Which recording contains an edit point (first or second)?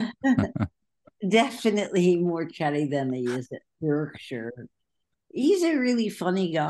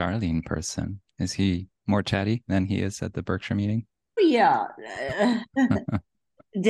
second